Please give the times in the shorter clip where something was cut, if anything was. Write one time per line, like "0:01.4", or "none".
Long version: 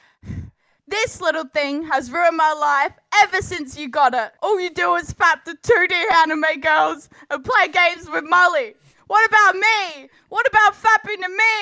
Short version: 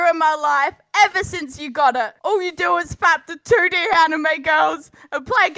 none